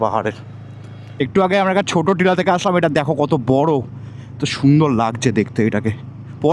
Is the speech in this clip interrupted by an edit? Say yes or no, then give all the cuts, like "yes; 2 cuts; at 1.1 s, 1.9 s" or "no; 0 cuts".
yes; 1 cut; at 1.2 s